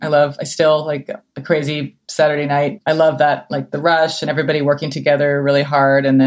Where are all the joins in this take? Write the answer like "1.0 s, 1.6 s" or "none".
2.8 s